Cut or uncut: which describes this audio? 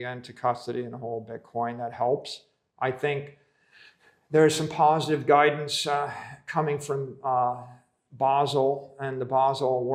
uncut